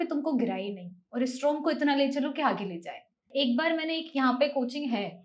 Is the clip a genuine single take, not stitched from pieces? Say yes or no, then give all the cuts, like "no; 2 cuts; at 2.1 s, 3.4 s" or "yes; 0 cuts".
no; 1 cut; at 3.2 s